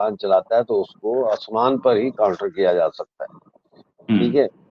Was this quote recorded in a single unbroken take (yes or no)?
yes